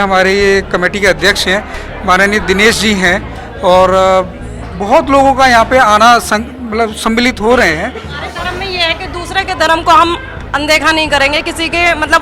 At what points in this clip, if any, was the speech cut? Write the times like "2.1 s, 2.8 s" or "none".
8.2 s